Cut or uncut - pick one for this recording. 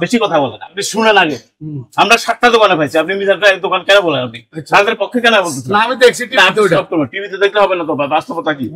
uncut